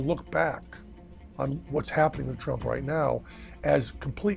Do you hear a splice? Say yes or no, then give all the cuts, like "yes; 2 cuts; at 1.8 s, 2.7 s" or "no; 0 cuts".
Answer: yes; 1 cut; at 1.6 s